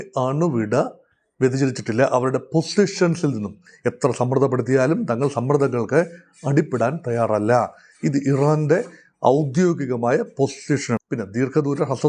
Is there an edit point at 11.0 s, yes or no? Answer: yes